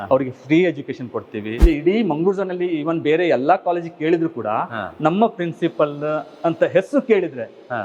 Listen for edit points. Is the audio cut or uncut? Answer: cut